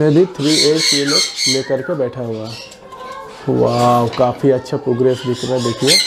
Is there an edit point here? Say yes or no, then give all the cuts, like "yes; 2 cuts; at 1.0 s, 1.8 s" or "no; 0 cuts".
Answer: no; 0 cuts